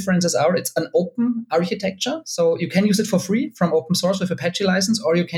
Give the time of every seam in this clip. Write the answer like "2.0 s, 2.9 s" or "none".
none